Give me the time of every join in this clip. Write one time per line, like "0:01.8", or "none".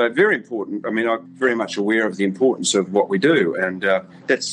0:01.2